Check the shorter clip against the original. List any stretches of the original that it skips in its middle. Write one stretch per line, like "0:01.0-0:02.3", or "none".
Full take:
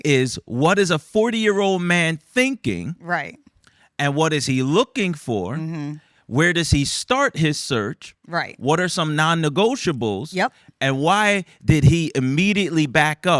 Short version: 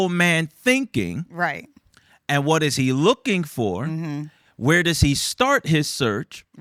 none